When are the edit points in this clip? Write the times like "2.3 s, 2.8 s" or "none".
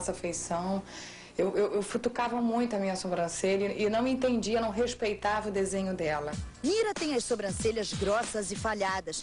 none